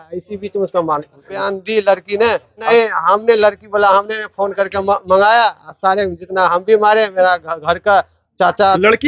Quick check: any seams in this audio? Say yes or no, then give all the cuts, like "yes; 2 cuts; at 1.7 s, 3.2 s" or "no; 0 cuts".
yes; 2 cuts; at 1.4 s, 2.7 s